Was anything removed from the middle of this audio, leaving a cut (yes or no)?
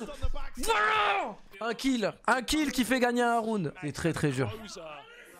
yes